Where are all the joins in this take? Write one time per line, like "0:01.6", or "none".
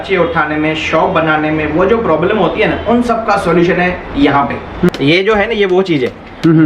0:04.9